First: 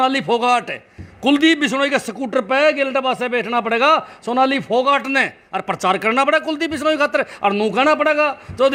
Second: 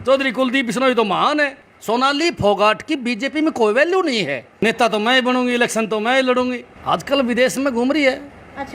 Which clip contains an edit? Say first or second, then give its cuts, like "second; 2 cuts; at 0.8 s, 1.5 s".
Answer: second; 3 cuts; at 1.7 s, 4.4 s, 6.7 s